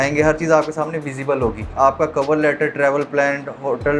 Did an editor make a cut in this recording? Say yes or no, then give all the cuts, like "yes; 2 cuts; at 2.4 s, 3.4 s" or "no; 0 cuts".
yes; 1 cut; at 1.6 s